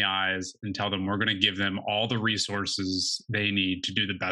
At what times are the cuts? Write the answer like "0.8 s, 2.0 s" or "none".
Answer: none